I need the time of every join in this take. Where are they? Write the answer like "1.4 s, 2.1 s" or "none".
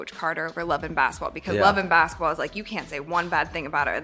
none

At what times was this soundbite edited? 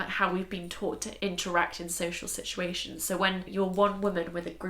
1.1 s, 3.5 s

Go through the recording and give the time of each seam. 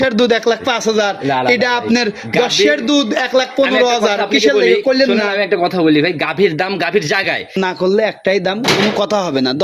7.5 s

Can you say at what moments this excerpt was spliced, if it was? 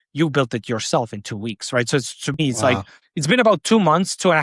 2.7 s

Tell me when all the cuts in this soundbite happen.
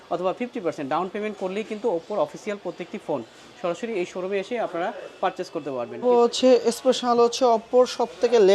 5.9 s

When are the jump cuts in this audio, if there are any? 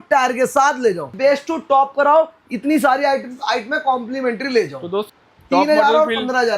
1.1 s, 5.0 s

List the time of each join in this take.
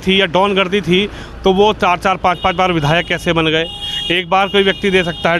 none

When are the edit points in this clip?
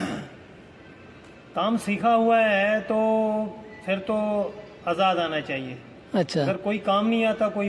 none

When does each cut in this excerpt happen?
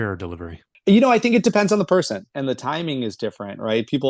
2.2 s

